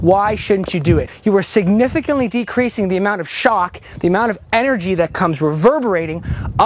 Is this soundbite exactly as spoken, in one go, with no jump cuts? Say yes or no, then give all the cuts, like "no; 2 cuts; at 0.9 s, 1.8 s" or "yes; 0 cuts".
no; 1 cut; at 1.1 s